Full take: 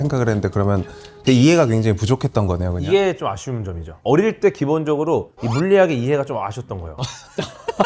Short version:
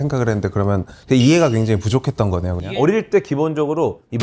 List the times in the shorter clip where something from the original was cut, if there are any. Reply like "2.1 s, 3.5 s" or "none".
0.9 s, 2.6 s